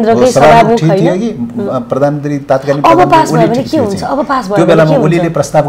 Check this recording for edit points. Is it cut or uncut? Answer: uncut